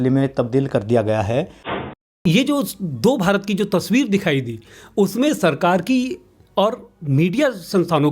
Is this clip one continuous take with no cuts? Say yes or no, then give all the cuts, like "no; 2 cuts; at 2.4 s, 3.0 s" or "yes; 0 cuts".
no; 1 cut; at 2.2 s